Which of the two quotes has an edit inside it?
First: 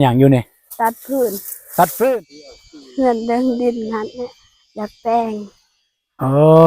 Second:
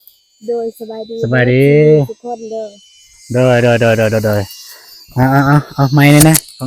first; 1 cut; at 2.2 s

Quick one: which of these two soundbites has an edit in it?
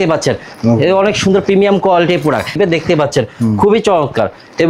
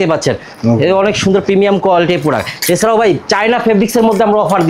first; 1 cut; at 2.5 s

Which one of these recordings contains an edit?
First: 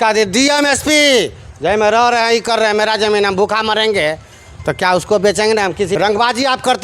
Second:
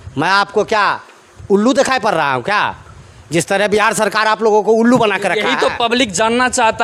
first; 1 cut; at 5.9 s

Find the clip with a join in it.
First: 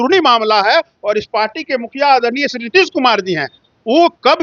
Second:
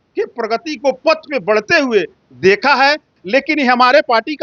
second; 1 cut; at 3.1 s

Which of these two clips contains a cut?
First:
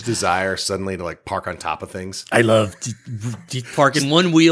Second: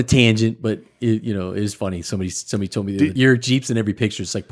second; 1 cut; at 3.1 s

